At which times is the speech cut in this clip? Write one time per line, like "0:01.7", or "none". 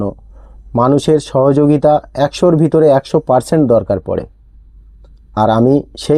none